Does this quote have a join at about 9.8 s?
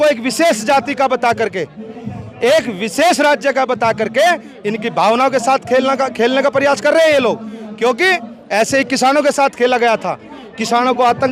no; 0 cuts

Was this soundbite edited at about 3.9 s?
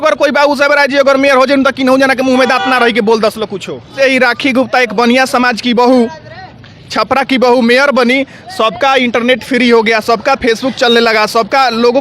yes; 1 cut; at 3.9 s

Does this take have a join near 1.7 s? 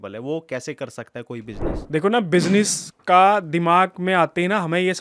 yes; 1 cut; at 1.7 s

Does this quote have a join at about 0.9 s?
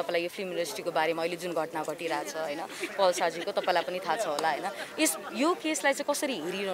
no; 0 cuts

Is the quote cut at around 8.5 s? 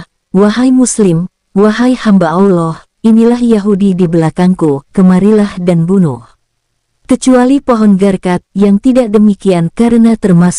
no; 0 cuts

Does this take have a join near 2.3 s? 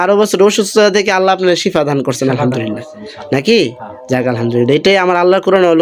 no; 0 cuts

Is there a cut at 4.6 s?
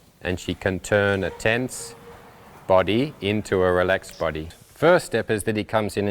yes; 1 cut; at 4.6 s

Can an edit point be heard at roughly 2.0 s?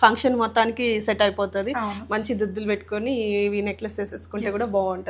no; 0 cuts

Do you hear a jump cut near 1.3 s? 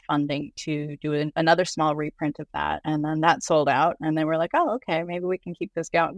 yes; 2 cuts; at 1.3 s, 2.8 s

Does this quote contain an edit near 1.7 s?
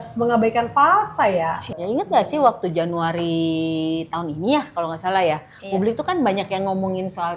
yes; 1 cut; at 1.7 s

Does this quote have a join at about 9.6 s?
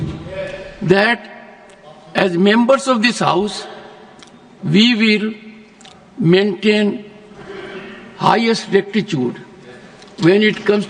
no; 0 cuts

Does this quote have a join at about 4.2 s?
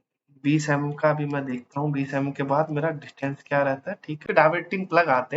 yes; 1 cut; at 4.2 s

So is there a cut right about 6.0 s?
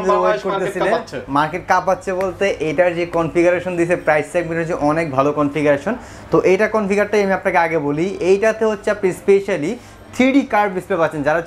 no; 0 cuts

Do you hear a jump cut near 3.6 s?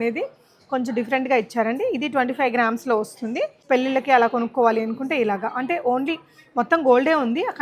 yes; 1 cut; at 3.6 s

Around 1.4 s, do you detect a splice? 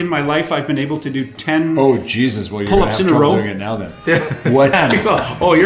no; 1 cut; at 4.7 s

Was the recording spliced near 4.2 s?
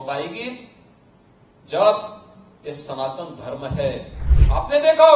yes; 1 cut; at 4.2 s

